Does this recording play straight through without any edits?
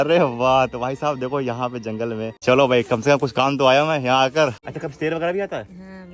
no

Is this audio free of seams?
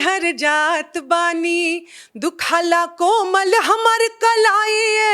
yes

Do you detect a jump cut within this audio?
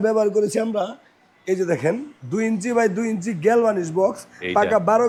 no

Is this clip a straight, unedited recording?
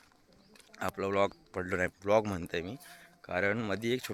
yes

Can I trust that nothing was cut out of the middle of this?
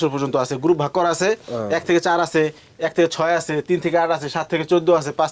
yes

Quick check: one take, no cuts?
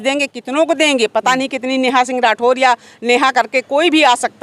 yes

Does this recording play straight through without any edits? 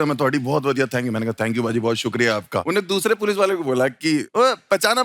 no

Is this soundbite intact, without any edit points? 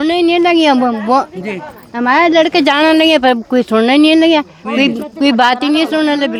yes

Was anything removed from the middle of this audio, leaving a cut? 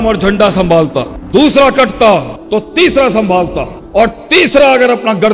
no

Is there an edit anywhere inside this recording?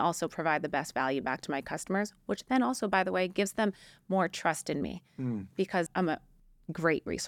yes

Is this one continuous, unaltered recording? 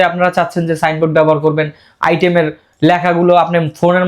yes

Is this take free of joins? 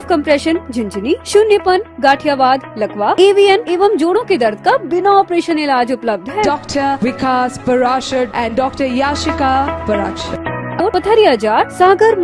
no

